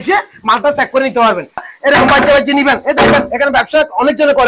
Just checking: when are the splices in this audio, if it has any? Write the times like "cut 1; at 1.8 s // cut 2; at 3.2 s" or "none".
cut 1; at 1.7 s